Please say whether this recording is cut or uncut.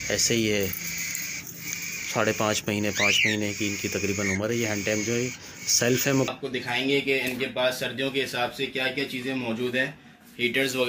cut